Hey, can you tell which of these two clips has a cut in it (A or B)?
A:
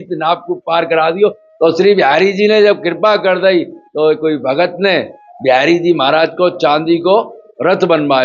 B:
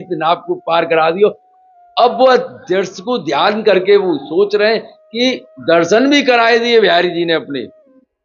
A